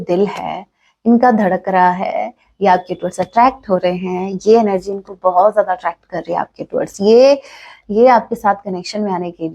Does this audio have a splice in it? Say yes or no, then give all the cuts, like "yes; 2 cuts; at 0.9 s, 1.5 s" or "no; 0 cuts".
no; 0 cuts